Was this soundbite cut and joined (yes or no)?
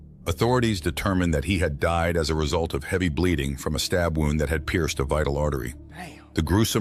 no